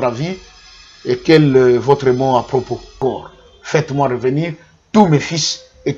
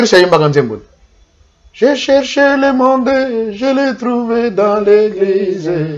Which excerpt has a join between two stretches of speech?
first; 1 cut; at 3.0 s

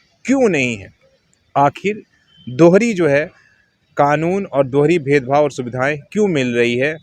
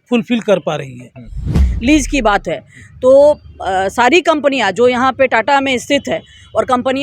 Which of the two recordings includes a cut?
second; 1 cut; at 1.5 s

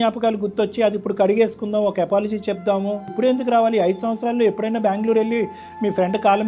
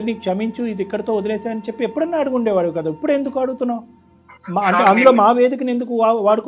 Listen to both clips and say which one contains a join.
first; 1 cut; at 3.1 s

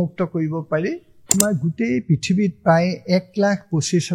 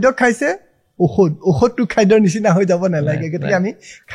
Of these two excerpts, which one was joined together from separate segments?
first; 1 cut; at 1.2 s

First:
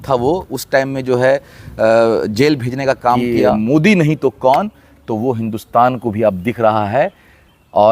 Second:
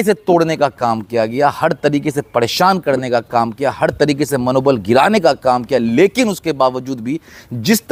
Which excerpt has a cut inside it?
first; 1 cut; at 3.4 s

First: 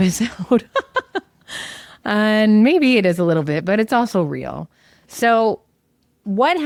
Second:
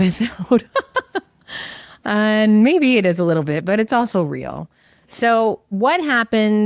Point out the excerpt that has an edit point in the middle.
second; 1 cut; at 5.7 s

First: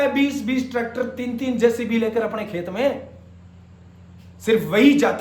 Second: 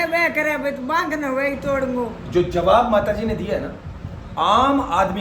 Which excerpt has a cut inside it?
second; 1 cut; at 2.2 s

